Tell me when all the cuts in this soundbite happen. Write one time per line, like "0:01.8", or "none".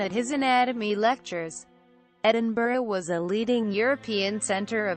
0:02.2